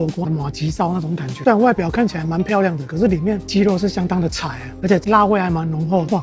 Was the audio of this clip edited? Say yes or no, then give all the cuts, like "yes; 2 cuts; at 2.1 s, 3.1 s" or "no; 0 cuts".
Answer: yes; 2 cuts; at 1.4 s, 4.7 s